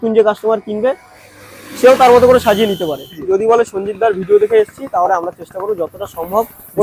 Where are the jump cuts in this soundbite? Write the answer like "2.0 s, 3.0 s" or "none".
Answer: 3.1 s